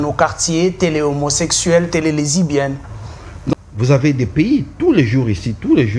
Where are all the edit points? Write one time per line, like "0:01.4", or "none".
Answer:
0:03.5